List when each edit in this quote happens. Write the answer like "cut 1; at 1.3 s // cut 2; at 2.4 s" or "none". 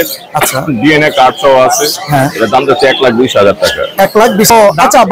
cut 1; at 4.1 s